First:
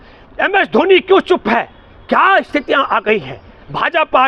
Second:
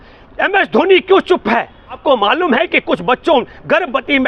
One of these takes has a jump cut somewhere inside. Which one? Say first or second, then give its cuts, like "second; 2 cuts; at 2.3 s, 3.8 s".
second; 1 cut; at 2.0 s